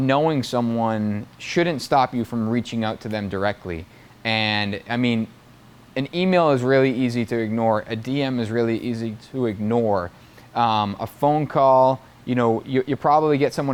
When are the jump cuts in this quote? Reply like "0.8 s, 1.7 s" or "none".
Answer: none